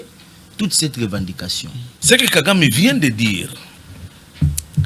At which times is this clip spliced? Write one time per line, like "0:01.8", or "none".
0:01.9